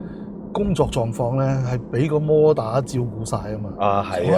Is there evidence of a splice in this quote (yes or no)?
no